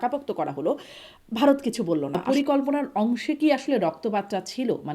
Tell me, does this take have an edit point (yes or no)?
yes